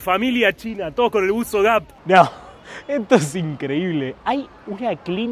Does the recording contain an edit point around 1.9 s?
yes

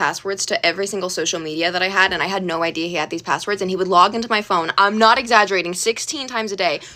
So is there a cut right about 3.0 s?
no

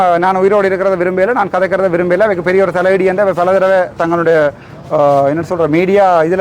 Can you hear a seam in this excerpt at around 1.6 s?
no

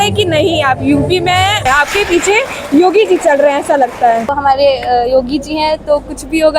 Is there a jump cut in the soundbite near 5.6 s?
no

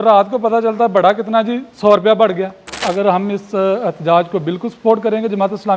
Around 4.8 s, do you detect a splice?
no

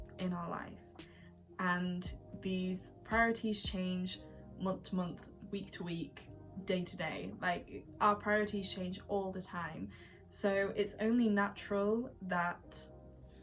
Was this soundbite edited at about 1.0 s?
no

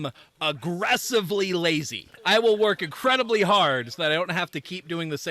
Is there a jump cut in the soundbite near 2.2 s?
yes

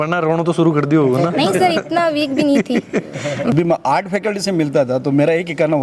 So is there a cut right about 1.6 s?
no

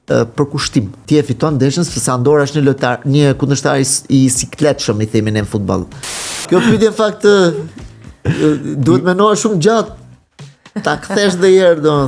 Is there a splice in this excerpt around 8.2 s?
no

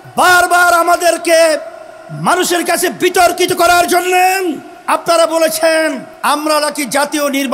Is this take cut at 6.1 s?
yes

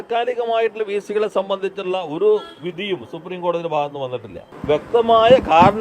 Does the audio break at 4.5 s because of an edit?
yes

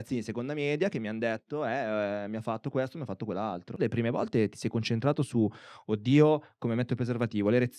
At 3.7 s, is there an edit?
yes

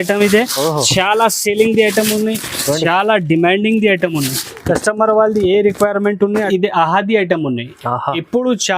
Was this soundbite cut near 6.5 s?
yes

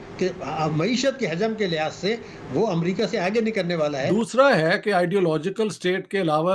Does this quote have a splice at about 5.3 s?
no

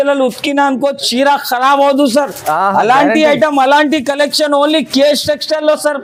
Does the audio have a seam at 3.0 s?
no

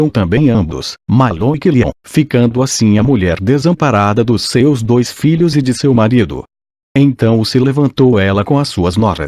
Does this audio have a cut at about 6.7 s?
yes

